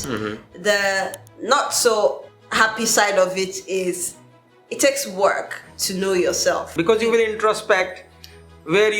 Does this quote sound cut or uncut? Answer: cut